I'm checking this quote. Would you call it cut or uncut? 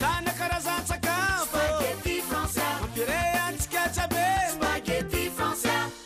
uncut